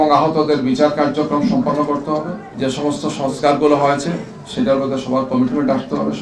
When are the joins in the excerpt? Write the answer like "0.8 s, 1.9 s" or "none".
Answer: 2.4 s